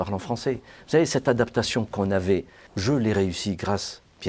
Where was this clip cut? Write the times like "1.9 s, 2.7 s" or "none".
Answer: 2.7 s